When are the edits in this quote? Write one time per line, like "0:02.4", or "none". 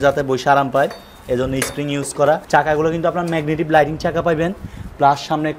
0:02.4

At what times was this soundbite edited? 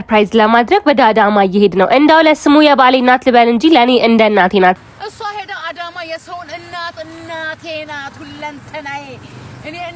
0:04.8

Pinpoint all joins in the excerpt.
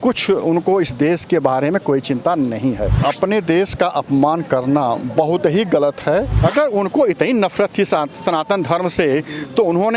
0:02.9
0:06.3

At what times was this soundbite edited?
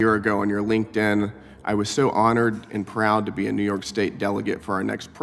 none

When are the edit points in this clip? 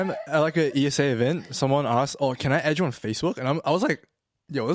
none

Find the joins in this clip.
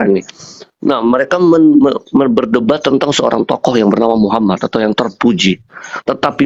none

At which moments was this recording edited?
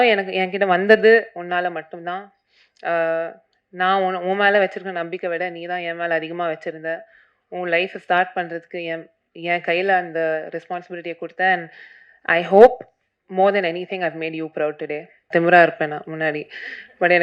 0:15.3

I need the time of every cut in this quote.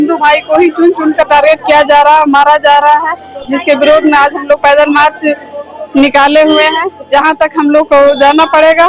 none

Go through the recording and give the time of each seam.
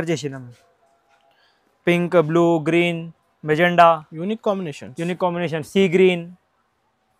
none

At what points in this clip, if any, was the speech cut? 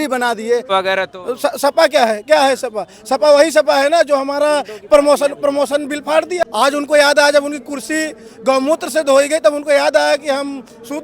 0:00.7
0:06.5

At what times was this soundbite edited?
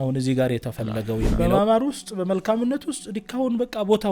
0:01.4

